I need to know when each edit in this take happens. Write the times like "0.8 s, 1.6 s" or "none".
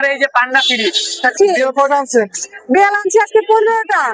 1.3 s